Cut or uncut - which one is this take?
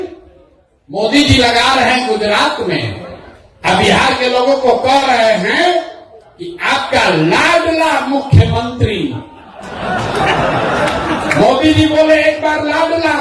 uncut